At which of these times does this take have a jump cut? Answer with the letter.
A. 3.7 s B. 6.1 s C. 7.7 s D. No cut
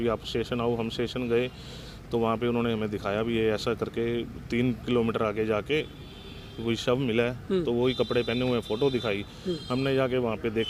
D